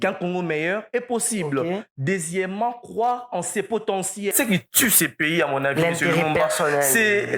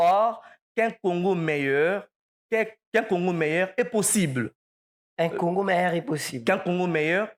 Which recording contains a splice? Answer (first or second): first